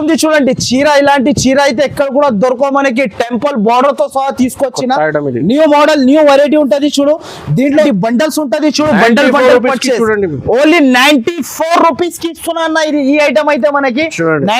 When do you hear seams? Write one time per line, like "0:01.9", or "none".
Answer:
0:07.8